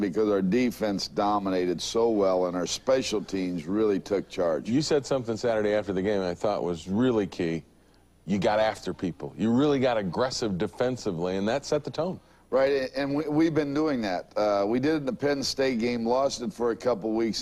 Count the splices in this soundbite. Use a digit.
1